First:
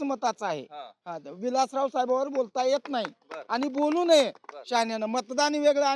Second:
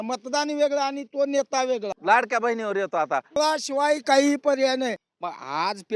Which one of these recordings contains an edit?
second; 3 cuts; at 1.9 s, 3.3 s, 5.0 s

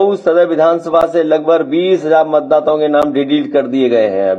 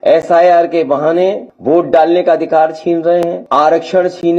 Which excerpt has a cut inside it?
second; 2 cuts; at 1.5 s, 3.4 s

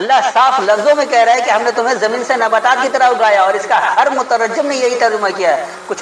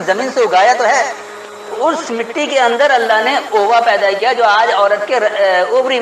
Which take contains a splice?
second; 1 cut; at 1.3 s

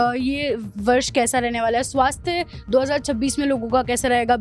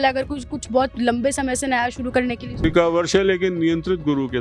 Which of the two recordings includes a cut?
second; 1 cut; at 2.6 s

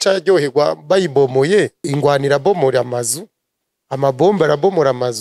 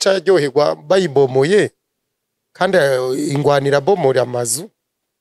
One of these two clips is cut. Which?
first; 1 cut; at 1.9 s

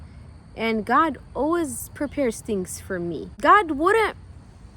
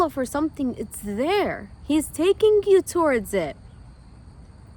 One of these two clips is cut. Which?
first; 1 cut; at 3.3 s

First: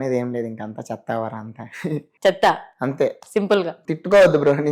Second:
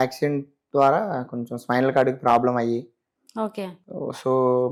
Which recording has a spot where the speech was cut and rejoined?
first; 2 cuts; at 2.1 s, 3.8 s

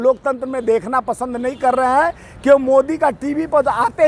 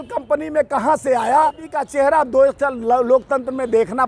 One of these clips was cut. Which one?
second; 1 cut; at 1.8 s

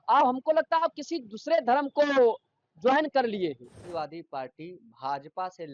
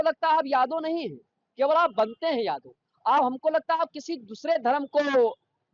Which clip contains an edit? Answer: first; 1 cut; at 3.8 s

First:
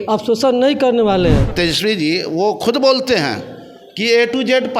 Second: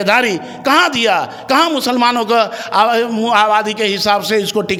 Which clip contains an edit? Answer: first; 1 cut; at 1.5 s

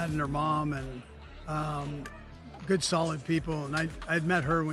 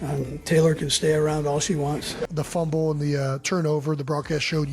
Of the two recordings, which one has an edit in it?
second; 1 cut; at 2.4 s

